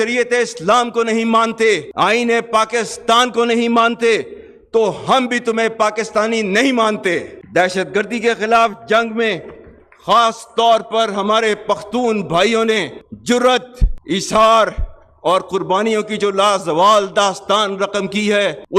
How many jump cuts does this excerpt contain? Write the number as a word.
zero